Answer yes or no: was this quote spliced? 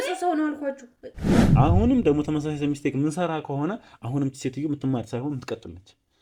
yes